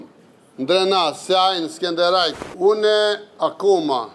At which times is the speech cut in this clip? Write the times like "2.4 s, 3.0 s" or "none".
2.4 s